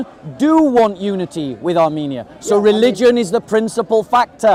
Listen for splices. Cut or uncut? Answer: uncut